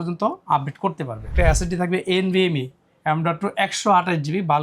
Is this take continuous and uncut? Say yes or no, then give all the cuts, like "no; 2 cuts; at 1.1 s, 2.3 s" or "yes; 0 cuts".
no; 1 cut; at 1.3 s